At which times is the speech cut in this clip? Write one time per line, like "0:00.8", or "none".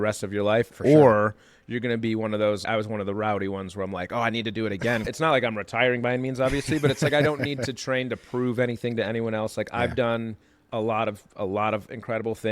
0:02.6
0:05.1